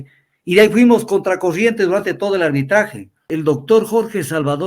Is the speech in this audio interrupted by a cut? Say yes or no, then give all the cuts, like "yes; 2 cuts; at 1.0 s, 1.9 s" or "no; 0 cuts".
yes; 1 cut; at 3.2 s